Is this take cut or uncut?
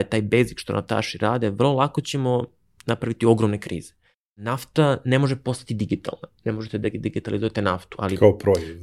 cut